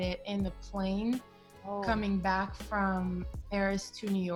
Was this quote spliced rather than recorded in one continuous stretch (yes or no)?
no